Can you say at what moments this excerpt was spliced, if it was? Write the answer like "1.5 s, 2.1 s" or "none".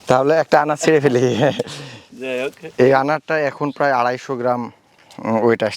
none